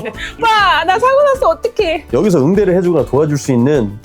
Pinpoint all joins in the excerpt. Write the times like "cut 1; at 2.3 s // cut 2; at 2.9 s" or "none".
cut 1; at 2.0 s